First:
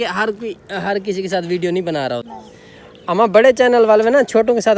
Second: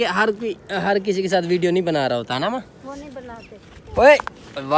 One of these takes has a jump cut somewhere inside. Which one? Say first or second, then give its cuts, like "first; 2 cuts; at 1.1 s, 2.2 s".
first; 1 cut; at 2.3 s